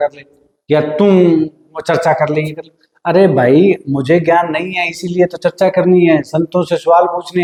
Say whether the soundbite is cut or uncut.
uncut